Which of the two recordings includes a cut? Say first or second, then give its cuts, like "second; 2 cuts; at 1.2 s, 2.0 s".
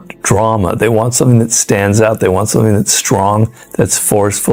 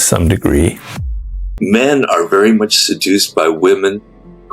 second; 1 cut; at 1.0 s